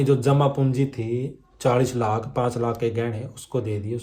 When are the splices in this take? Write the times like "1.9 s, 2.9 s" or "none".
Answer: none